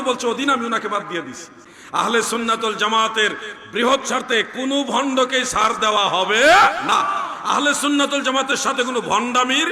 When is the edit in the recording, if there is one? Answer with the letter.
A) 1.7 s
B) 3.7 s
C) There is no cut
A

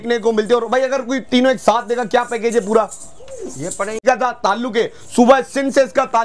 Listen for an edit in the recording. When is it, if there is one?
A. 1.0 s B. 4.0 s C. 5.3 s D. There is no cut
B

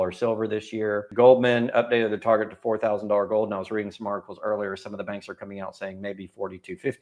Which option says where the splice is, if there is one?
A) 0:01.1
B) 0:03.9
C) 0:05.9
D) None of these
A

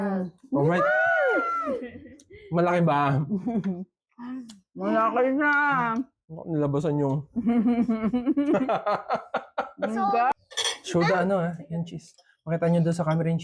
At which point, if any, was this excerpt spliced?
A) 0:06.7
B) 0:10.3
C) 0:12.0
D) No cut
B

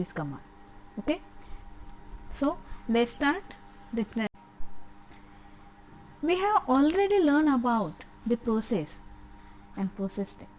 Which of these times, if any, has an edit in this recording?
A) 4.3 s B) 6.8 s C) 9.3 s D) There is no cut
A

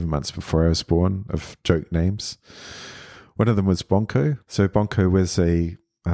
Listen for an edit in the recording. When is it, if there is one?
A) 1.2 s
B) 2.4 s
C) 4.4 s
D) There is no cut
C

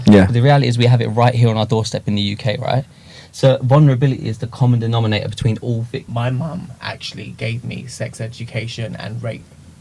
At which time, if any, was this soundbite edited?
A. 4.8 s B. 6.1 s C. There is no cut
B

